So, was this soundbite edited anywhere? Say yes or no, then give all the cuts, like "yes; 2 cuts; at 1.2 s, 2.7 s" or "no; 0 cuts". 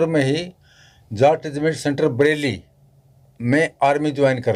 no; 0 cuts